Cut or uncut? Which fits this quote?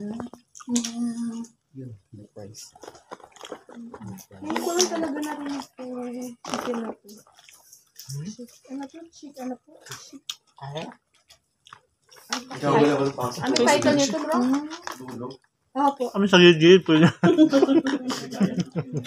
cut